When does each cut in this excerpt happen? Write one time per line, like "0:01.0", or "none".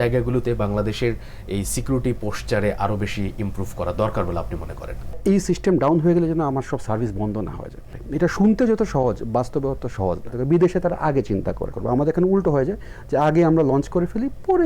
0:05.2
0:08.0
0:10.4
0:11.7

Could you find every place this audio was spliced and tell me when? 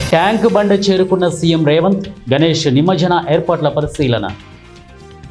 0:04.4

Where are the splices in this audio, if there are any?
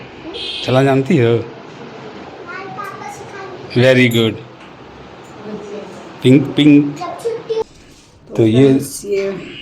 0:07.6

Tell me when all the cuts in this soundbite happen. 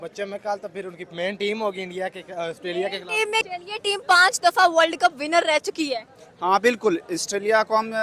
0:03.5

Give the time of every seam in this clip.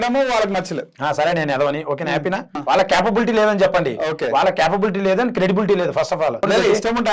0:02.5
0:06.5

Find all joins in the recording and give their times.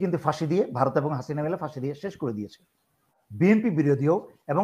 0:03.2

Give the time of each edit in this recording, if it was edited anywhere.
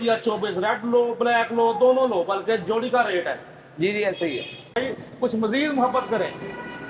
0:04.8

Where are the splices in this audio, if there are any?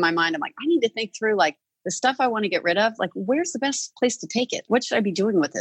0:04.6

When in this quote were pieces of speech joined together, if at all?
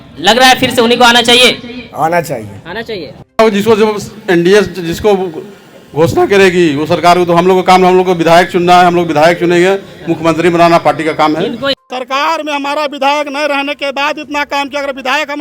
0:03.4
0:11.8

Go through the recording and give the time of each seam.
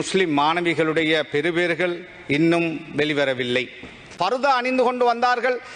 0:04.1

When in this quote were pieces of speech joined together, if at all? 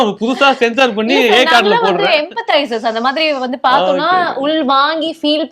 none

